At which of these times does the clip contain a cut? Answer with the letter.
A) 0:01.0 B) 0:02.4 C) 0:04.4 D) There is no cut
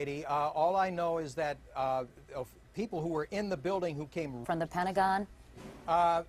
D